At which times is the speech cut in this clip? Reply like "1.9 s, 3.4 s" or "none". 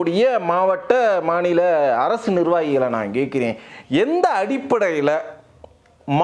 none